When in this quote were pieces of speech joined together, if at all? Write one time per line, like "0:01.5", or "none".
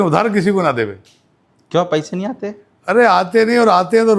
none